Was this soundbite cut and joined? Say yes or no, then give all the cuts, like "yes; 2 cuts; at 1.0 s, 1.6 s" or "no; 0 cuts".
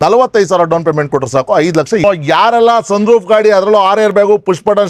yes; 1 cut; at 2.0 s